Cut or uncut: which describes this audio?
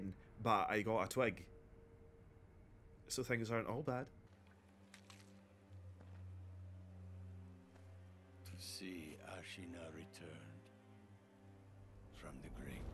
cut